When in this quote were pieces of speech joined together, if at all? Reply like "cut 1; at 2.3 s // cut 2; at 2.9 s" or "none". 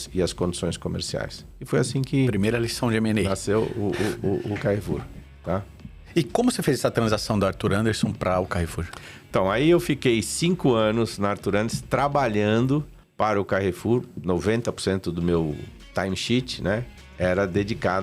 none

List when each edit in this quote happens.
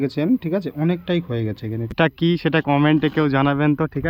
cut 1; at 1.9 s

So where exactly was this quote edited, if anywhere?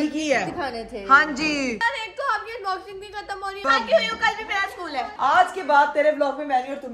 cut 1; at 1.8 s // cut 2; at 3.6 s // cut 3; at 5.1 s

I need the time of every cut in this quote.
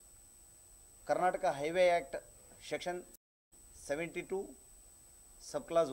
none

